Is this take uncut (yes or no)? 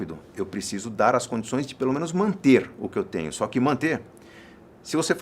yes